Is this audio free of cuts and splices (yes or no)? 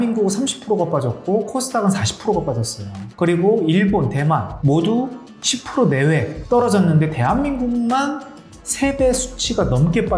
yes